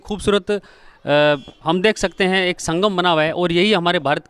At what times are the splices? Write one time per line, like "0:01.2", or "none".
none